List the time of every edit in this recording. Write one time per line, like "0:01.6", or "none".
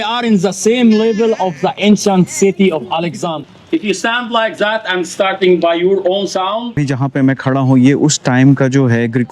0:03.4
0:06.9